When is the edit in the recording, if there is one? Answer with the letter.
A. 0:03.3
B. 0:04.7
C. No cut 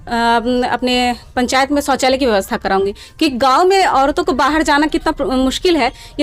C